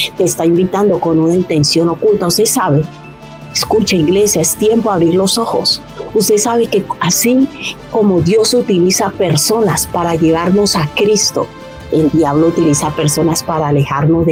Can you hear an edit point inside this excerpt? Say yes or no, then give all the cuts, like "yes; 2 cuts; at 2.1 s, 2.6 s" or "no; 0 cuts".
no; 0 cuts